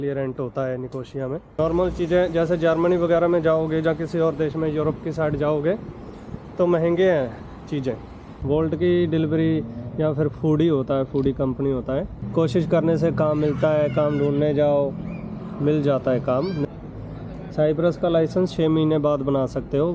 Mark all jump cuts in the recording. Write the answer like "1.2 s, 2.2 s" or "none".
1.5 s, 8.3 s, 12.2 s, 16.6 s